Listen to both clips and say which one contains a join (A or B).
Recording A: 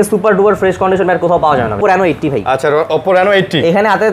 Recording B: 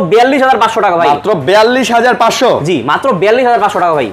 A